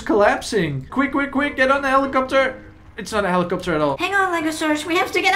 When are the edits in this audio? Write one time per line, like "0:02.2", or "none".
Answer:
0:04.0